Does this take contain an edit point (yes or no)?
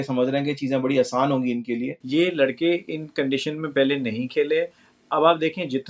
yes